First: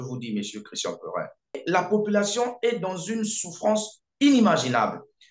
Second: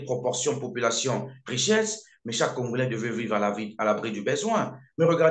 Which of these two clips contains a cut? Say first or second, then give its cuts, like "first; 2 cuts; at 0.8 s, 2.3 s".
first; 1 cut; at 1.6 s